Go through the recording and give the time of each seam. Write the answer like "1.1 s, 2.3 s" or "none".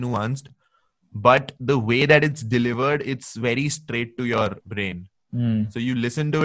4.6 s